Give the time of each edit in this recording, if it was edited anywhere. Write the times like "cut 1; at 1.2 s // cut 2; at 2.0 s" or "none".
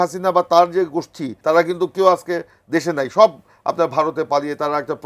cut 1; at 1.3 s